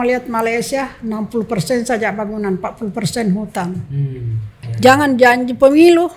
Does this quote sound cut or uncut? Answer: cut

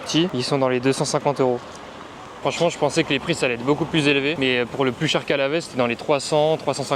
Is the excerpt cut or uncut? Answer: uncut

